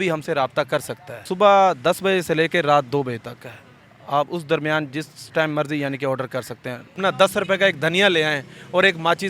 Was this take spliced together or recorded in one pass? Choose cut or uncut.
cut